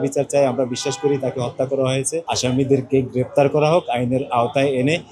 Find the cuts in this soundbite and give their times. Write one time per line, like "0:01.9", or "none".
0:02.2